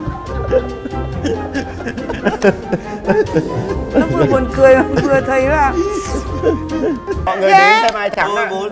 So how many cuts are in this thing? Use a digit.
1